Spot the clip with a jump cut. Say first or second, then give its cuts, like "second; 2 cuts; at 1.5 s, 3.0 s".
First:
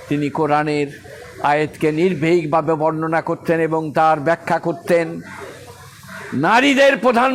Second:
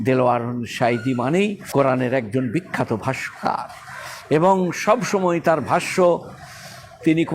second; 1 cut; at 1.6 s